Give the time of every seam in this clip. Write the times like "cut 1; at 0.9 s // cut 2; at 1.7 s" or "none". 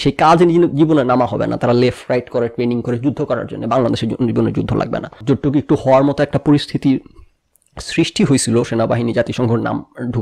cut 1; at 5.2 s